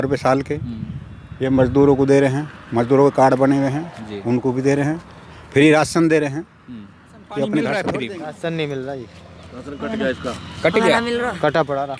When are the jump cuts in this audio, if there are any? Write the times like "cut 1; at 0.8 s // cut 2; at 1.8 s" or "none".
cut 1; at 7.8 s